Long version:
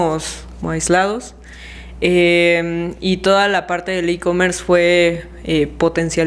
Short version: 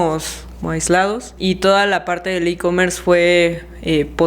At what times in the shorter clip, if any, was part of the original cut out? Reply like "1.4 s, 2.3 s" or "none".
1.3 s

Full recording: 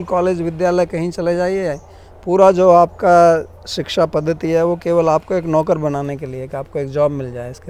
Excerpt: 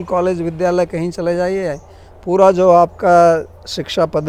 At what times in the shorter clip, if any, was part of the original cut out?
none

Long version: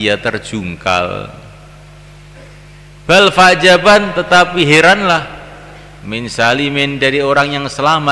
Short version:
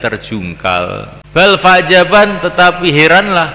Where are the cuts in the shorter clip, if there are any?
1.1 s

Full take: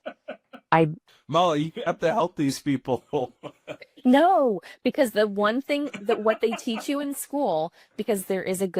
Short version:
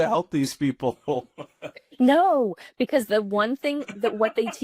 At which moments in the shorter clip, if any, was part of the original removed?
none

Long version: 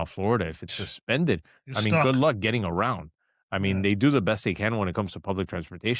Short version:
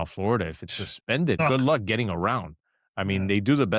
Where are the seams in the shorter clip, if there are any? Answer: 1.4 s

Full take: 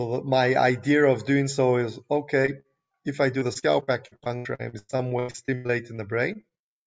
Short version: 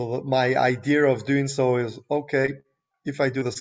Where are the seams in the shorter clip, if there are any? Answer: none

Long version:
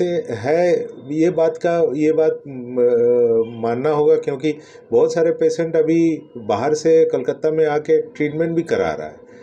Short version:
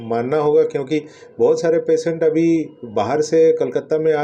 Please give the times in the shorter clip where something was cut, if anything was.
none

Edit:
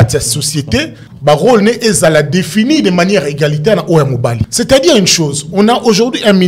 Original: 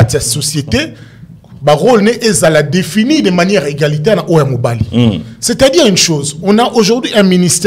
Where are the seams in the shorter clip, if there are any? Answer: 1.0 s, 4.4 s

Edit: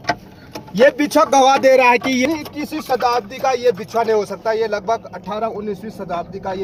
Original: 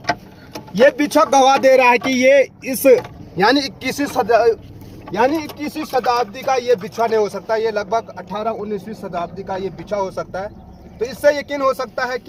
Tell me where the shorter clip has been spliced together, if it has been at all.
2.2 s

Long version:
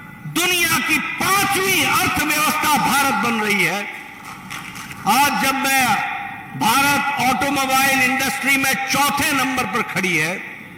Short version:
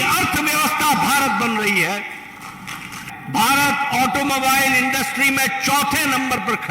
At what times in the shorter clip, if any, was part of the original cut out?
3.0 s

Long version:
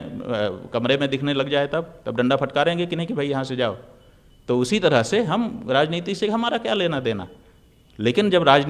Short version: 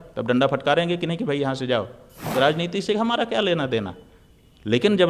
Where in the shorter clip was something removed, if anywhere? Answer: 2.2 s

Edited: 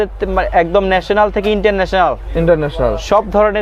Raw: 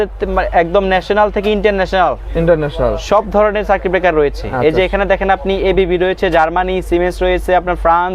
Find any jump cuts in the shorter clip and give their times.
none

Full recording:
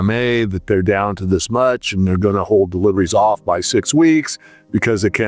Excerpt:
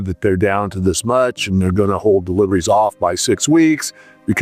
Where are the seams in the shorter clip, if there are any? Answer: none

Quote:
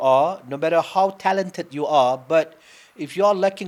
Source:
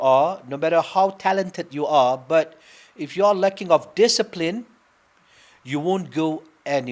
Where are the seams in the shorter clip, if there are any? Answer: none

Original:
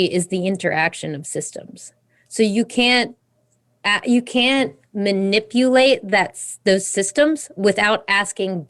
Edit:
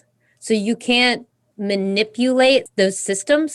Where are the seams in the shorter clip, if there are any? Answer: 1.5 s, 2.7 s

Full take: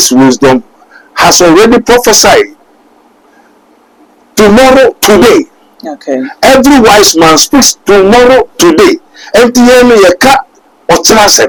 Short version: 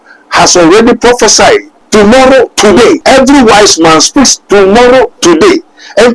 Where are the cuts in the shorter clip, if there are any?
1.8 s, 3.0 s

